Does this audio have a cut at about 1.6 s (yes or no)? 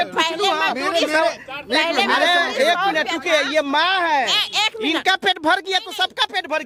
no